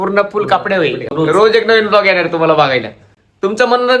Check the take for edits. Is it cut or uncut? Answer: cut